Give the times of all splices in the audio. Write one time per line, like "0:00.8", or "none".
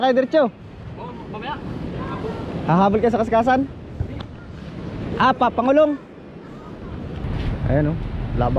0:07.2